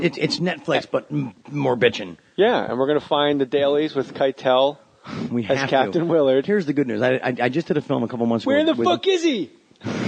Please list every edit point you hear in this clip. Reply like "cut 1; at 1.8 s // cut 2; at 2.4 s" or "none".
none